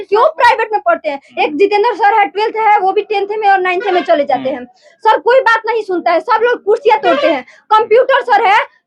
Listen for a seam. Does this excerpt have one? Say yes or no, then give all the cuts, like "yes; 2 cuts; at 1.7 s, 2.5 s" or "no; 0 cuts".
yes; 1 cut; at 1.3 s